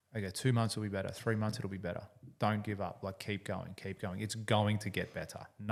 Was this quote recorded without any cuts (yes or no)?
yes